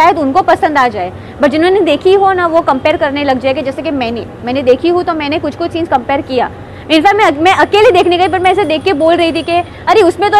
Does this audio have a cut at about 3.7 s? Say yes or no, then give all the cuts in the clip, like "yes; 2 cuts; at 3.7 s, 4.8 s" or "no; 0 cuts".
no; 0 cuts